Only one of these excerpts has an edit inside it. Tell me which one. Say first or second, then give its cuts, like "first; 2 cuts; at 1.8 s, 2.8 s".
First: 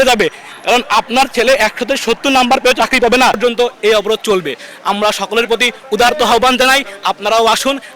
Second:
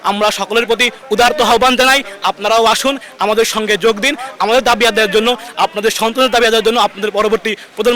first; 1 cut; at 3.4 s